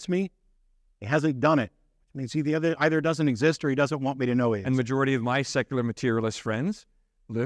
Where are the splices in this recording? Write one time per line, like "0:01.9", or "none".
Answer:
0:04.6